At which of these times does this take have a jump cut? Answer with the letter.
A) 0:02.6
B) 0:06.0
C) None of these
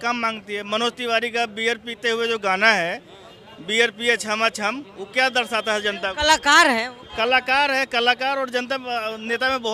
C